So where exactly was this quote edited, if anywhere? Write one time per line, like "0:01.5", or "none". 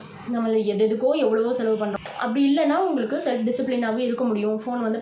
none